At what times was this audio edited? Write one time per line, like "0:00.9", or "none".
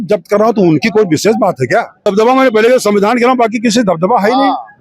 0:02.1